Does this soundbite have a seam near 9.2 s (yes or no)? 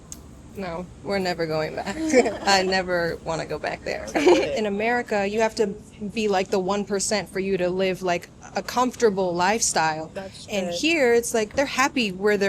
no